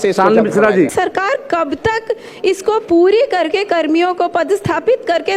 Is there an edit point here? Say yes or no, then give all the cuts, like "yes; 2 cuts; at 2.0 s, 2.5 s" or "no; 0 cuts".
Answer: yes; 1 cut; at 0.9 s